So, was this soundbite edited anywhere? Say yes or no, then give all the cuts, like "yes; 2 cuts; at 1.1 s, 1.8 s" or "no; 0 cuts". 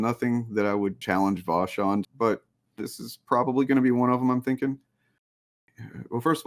yes; 3 cuts; at 1.0 s, 2.1 s, 5.3 s